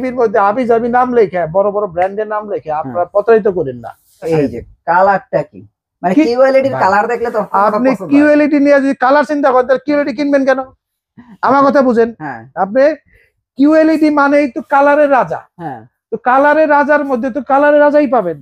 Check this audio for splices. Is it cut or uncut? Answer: cut